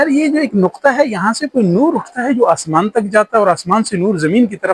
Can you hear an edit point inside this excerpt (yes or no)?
no